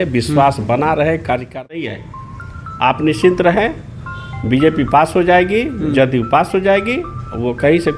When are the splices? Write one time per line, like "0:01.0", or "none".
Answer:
0:01.8